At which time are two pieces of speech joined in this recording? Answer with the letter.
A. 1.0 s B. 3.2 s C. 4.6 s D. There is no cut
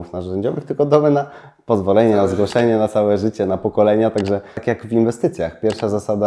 C